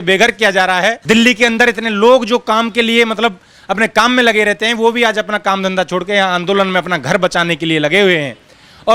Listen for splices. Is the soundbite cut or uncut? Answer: uncut